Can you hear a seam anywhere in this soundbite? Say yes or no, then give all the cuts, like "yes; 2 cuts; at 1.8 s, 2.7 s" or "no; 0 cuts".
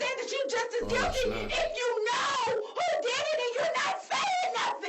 no; 0 cuts